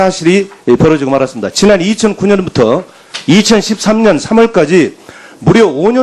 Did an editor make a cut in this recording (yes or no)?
no